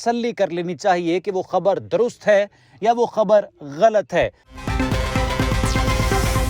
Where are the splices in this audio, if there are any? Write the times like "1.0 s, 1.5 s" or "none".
4.4 s